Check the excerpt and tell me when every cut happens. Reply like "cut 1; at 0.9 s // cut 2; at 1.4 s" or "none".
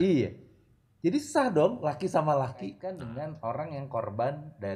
cut 1; at 2.8 s